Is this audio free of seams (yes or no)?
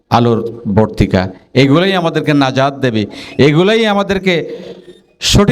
yes